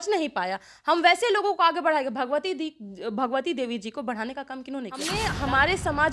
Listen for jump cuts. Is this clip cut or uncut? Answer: cut